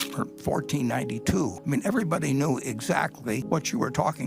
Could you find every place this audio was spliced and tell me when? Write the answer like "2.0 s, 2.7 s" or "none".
1.6 s, 3.4 s